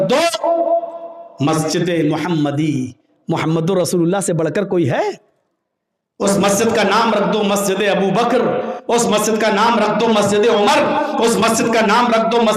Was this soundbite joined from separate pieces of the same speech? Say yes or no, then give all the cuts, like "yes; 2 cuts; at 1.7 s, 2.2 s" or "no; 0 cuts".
no; 0 cuts